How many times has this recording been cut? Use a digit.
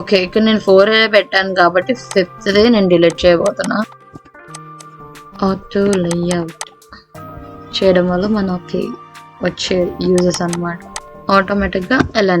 0